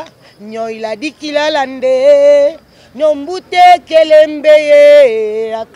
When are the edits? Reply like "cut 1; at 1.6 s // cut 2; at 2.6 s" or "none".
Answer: none